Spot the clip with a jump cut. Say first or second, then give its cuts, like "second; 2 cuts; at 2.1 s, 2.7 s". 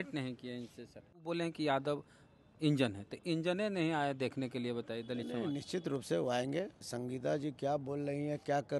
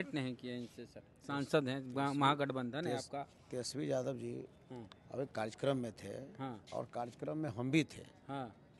first; 2 cuts; at 1.1 s, 6.8 s